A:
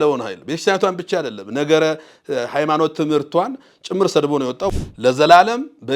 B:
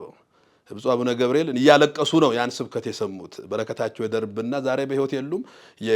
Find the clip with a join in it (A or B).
A